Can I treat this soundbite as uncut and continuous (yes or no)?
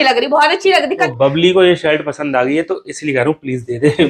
no